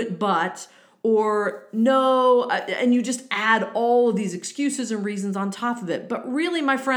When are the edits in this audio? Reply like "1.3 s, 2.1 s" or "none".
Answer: none